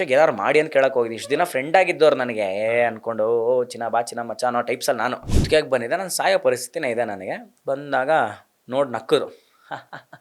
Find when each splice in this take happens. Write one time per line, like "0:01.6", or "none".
0:05.3